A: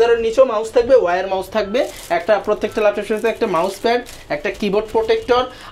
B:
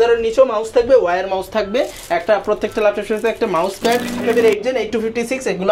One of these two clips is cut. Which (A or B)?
B